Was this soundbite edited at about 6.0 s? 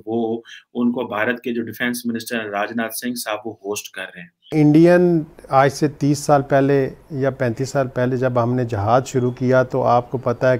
no; 1 cut; at 4.5 s

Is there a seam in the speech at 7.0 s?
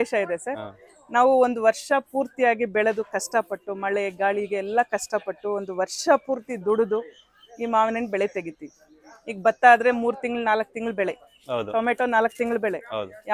no; 0 cuts

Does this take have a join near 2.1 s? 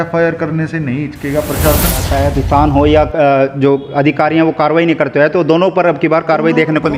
yes; 1 cut; at 2.1 s

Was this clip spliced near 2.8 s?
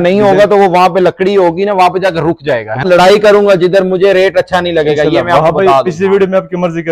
yes; 1 cut; at 2.8 s

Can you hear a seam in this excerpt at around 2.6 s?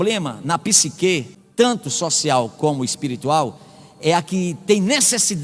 no; 1 cut; at 1.4 s

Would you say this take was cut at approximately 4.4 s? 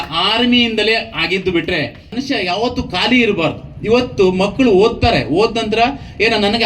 no; 1 cut; at 2.1 s

